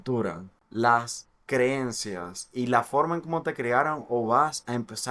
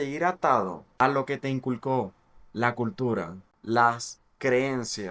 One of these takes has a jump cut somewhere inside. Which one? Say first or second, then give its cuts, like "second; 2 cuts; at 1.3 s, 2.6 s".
second; 1 cut; at 0.9 s